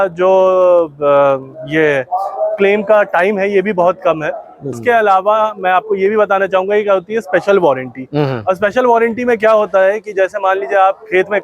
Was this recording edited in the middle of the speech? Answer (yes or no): yes